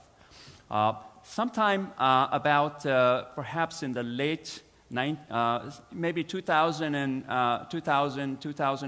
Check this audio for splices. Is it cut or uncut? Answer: uncut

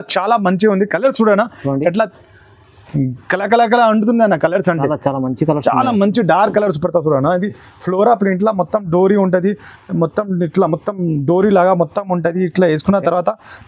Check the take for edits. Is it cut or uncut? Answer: uncut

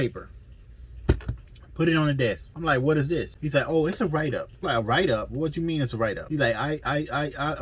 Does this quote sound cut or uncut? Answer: cut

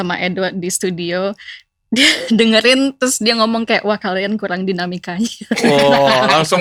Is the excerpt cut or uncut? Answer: uncut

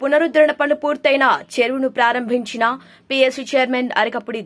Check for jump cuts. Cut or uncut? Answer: uncut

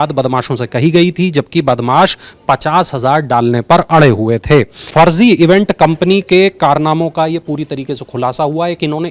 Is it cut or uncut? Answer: cut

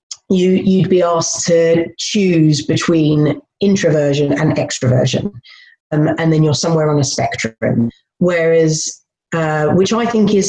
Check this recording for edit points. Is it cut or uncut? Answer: uncut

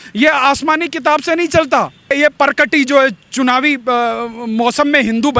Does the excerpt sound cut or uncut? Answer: cut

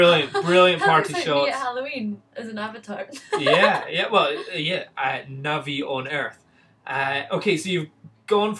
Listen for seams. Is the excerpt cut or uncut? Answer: uncut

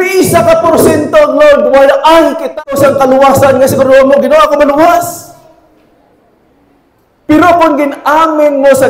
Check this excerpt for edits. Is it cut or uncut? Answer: cut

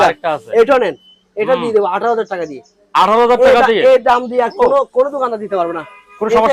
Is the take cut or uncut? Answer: uncut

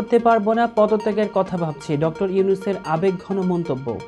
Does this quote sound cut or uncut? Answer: uncut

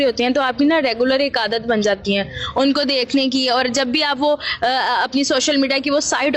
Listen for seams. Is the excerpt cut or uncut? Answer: uncut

